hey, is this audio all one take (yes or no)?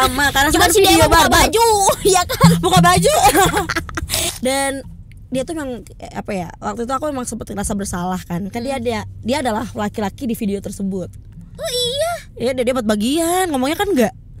no